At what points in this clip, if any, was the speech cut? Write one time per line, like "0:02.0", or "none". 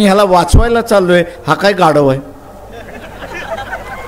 none